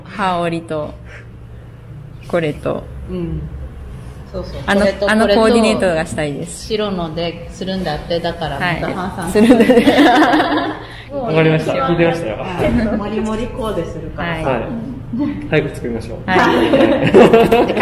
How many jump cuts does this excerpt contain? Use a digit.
0